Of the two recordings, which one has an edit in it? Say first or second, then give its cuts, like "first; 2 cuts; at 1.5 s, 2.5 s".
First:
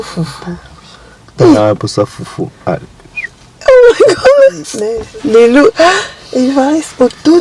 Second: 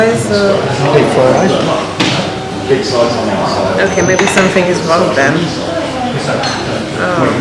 first; 1 cut; at 4.9 s